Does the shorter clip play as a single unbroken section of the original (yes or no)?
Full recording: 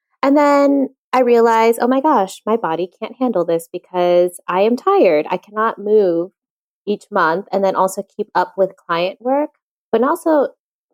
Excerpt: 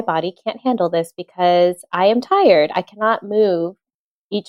yes